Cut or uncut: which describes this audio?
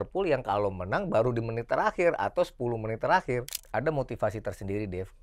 cut